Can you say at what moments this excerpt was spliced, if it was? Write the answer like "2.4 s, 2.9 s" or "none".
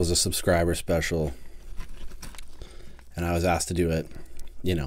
none